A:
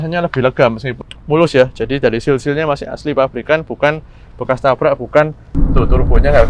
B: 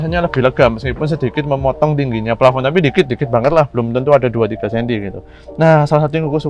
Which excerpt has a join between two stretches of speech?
A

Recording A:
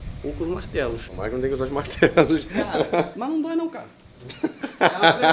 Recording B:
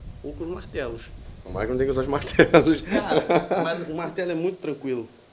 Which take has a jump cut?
A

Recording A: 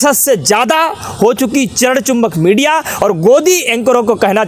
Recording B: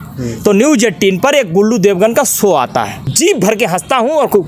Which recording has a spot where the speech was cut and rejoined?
B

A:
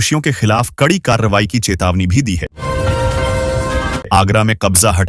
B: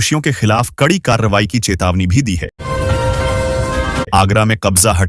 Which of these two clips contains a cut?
A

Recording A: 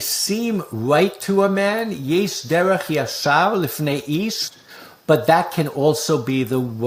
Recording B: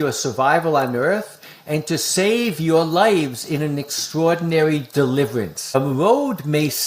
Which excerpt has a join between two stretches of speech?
B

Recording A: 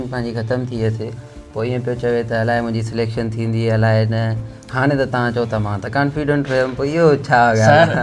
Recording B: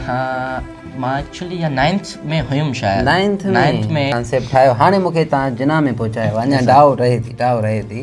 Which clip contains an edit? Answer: B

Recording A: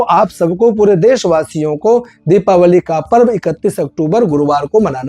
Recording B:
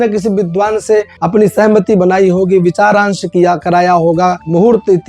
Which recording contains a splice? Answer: B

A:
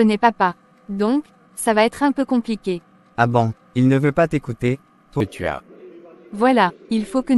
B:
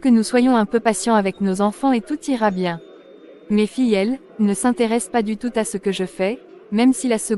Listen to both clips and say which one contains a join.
A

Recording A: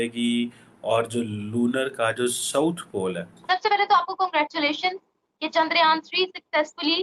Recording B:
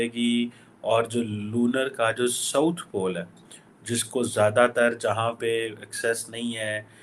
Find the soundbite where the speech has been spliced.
A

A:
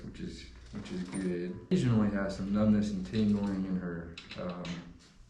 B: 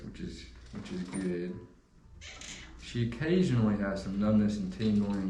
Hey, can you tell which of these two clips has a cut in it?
A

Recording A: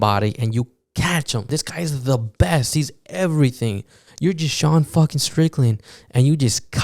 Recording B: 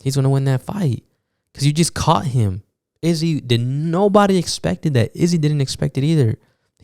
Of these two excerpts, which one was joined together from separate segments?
A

